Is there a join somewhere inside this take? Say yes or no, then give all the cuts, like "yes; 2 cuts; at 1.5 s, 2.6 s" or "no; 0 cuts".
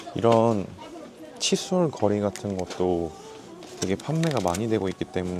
no; 0 cuts